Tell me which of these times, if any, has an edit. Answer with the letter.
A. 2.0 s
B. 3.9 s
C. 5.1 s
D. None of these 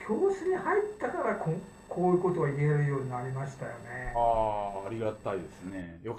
D